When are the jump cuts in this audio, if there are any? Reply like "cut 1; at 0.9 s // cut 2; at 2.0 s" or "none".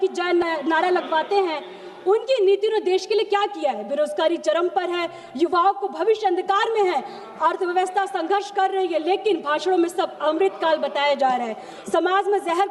none